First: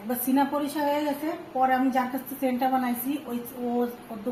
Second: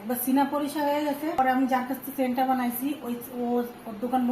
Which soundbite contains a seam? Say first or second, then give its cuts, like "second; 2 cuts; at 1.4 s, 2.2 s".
second; 1 cut; at 1.4 s